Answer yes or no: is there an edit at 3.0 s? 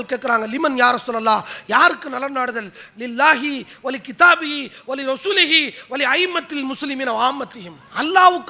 no